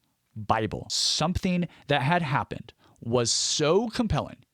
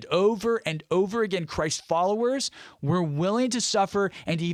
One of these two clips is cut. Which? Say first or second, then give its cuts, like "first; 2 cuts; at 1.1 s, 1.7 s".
first; 1 cut; at 1.0 s